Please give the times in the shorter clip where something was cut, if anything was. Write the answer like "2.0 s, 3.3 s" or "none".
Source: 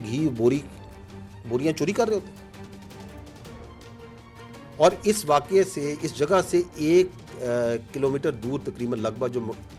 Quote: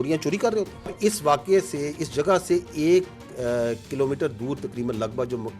0.9 s